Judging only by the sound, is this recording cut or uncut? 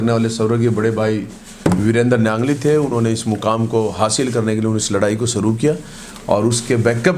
uncut